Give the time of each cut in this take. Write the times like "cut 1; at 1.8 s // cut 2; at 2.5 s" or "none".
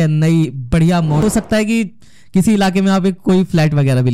cut 1; at 1.2 s